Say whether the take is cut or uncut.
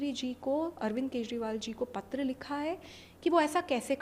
uncut